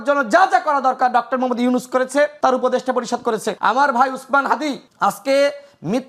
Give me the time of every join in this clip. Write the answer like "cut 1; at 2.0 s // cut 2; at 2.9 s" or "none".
cut 1; at 2.3 s // cut 2; at 3.5 s // cut 3; at 4.9 s